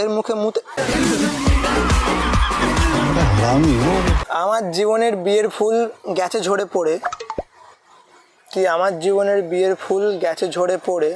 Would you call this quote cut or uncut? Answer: cut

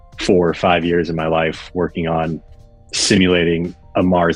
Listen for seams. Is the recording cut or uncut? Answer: uncut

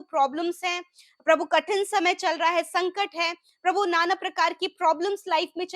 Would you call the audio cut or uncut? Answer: uncut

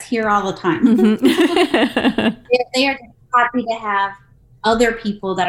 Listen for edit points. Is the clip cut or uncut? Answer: cut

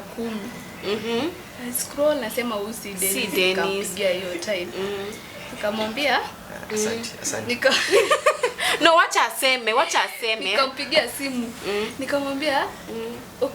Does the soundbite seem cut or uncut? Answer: uncut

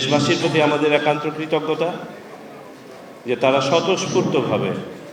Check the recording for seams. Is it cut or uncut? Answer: uncut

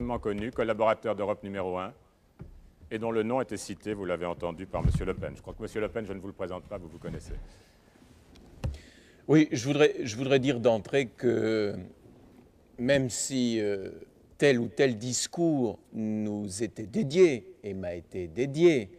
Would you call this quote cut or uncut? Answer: uncut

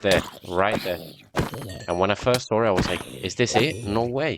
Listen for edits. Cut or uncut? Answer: uncut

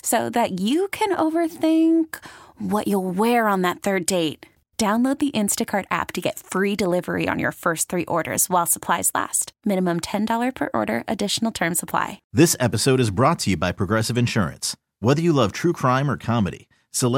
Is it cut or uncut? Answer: cut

